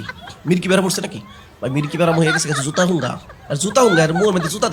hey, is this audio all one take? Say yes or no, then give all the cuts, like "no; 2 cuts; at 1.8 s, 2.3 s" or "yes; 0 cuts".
yes; 0 cuts